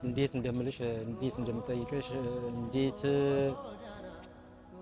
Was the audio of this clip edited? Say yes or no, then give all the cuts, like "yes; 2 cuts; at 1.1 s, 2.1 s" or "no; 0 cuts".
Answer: yes; 1 cut; at 3.5 s